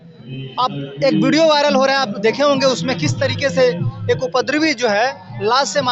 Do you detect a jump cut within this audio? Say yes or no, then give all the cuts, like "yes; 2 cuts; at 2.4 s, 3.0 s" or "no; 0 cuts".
no; 0 cuts